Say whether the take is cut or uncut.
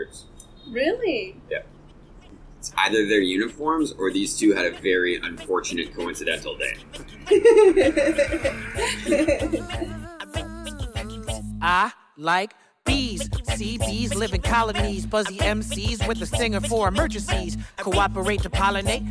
cut